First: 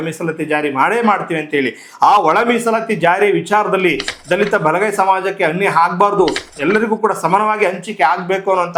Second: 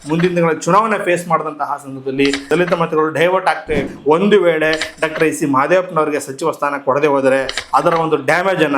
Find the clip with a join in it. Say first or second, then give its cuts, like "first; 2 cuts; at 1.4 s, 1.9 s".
second; 3 cuts; at 2.5 s, 3.8 s, 7.6 s